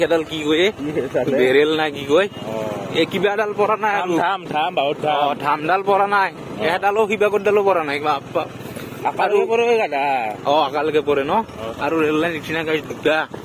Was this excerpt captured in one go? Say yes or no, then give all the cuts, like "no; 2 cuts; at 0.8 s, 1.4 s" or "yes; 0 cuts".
yes; 0 cuts